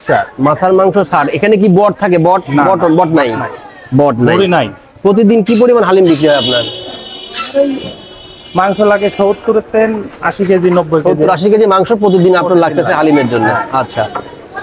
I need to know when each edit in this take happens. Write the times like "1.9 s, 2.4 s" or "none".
none